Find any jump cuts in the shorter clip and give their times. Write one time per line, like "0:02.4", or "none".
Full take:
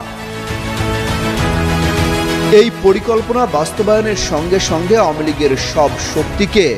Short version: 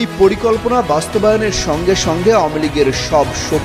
none